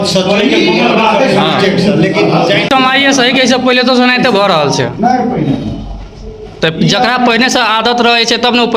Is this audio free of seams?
no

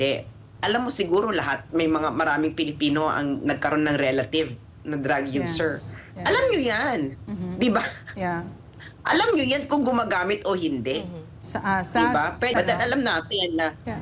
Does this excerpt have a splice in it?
yes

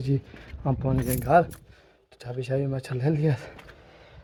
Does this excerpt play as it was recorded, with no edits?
yes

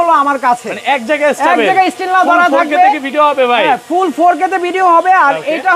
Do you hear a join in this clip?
no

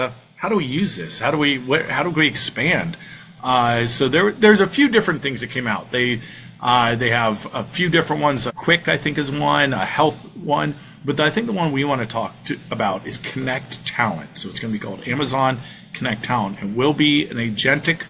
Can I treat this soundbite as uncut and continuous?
yes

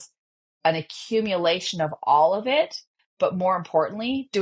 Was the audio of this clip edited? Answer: no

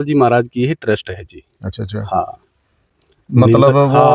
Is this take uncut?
yes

